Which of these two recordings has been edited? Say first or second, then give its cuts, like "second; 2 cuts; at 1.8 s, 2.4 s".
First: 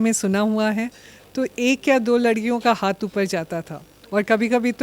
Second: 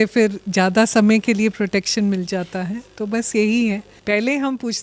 second; 1 cut; at 3.9 s